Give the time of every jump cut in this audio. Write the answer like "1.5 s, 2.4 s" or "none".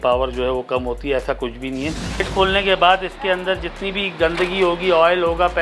2.2 s